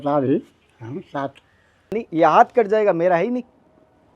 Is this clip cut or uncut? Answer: cut